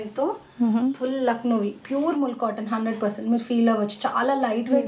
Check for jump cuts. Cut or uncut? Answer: uncut